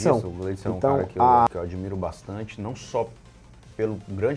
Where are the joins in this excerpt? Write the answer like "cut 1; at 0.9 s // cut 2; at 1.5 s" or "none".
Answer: cut 1; at 1.5 s